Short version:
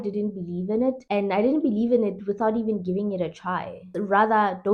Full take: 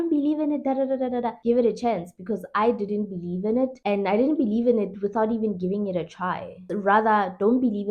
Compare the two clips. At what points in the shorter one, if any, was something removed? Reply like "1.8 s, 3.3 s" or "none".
none